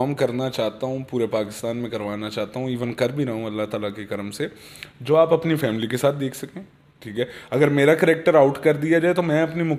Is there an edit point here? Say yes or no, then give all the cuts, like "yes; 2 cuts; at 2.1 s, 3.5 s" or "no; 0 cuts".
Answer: no; 0 cuts